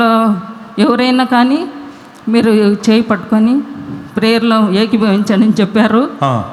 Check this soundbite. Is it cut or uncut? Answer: uncut